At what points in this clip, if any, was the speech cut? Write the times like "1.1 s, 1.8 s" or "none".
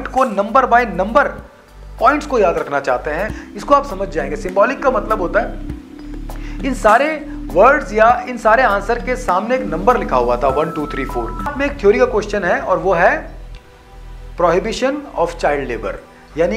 3.4 s, 11.5 s